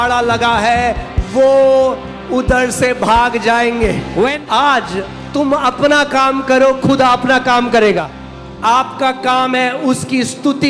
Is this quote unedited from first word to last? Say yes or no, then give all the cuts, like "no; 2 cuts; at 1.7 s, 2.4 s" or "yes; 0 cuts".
no; 2 cuts; at 4.4 s, 8.1 s